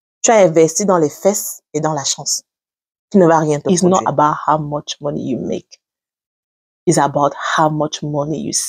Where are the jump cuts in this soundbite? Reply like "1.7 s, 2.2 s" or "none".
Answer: 3.6 s

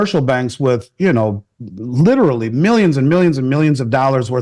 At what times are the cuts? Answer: none

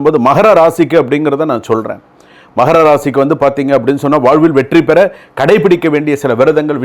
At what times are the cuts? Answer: none

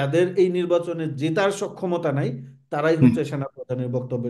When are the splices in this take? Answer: none

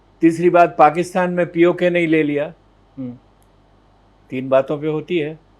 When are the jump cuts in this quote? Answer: none

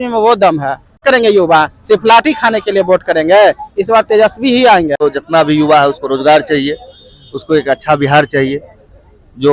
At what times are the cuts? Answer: 1.0 s, 4.9 s

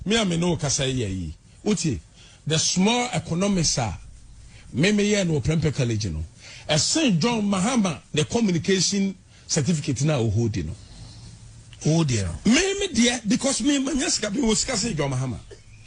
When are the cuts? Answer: none

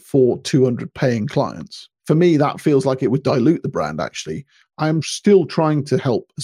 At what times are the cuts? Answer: 1.9 s, 5.1 s

